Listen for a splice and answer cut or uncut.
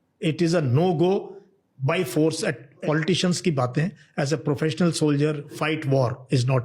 cut